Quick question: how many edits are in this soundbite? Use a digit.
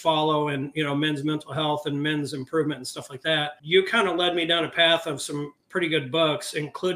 1